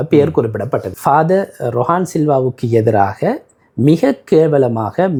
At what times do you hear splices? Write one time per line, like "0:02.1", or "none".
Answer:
none